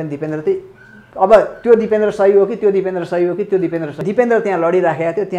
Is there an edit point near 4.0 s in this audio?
yes; 1 cut; at 4.0 s

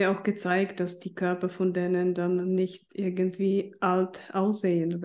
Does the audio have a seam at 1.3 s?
no; 0 cuts

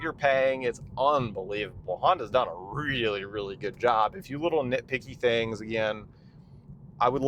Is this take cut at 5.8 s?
no; 1 cut; at 4.2 s

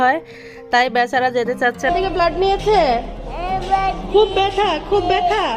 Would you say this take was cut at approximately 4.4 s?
no; 1 cut; at 1.9 s

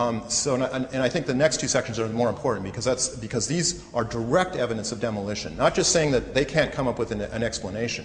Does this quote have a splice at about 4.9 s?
yes; 1 cut; at 4.9 s

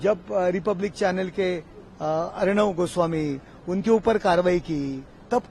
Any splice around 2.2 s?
no; 0 cuts

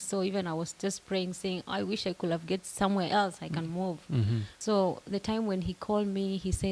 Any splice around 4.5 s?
yes; 1 cut; at 4.5 s

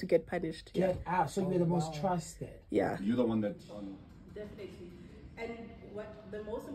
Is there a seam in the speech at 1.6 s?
no; 1 cut; at 3.6 s

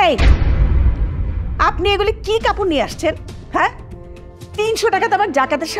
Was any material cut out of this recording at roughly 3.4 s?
no; 0 cuts

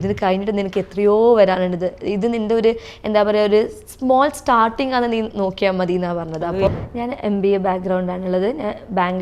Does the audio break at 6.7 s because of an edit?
yes; 1 cut; at 6.7 s

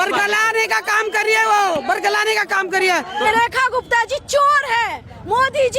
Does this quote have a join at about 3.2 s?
yes; 1 cut; at 3.2 s

